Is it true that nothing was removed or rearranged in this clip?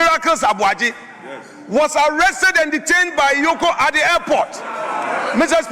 yes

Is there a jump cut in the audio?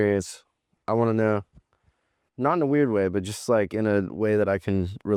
no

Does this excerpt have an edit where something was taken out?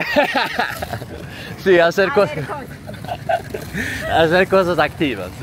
no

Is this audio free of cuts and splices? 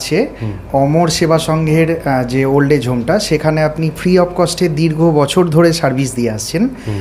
yes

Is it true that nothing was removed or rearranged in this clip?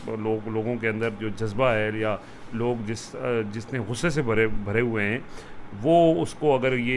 yes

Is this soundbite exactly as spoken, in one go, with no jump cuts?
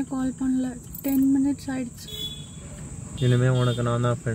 no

